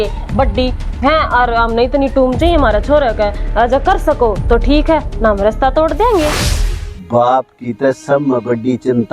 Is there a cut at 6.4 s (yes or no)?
yes